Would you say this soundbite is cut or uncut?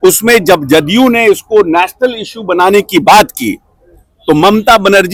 uncut